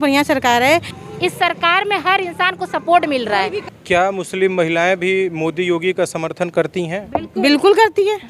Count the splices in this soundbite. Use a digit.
2